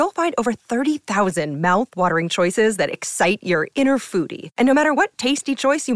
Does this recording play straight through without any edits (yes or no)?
yes